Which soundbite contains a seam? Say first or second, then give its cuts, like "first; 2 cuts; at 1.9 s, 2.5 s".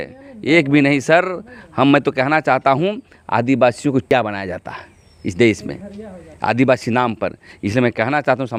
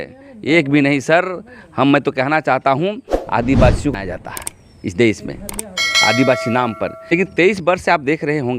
second; 2 cuts; at 3.9 s, 7.0 s